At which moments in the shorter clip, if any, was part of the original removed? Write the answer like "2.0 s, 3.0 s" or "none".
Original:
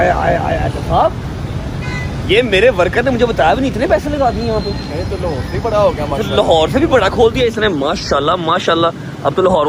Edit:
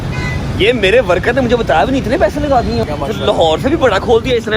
2.8 s